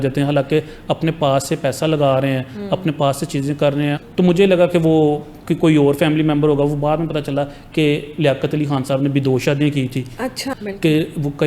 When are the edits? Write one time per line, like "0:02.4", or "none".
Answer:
0:04.0
0:10.4